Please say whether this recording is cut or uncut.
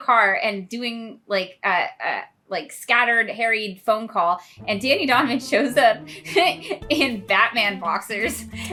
uncut